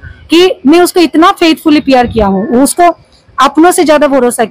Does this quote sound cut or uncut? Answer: uncut